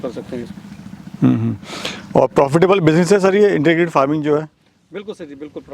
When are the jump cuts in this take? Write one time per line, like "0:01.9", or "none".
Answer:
none